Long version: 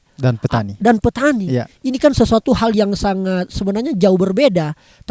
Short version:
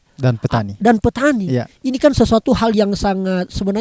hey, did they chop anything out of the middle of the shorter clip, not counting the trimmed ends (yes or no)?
no